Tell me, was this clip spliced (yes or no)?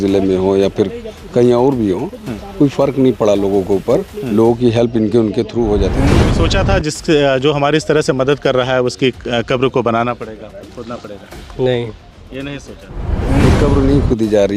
yes